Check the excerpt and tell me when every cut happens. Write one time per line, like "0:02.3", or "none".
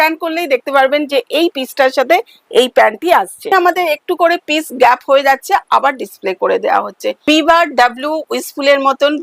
0:03.5
0:07.1